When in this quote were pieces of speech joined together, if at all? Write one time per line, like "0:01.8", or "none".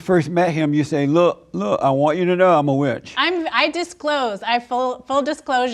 none